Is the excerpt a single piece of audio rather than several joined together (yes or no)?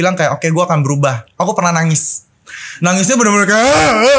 no